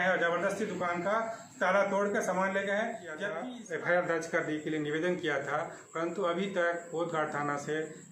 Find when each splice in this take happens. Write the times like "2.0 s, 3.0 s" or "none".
3.3 s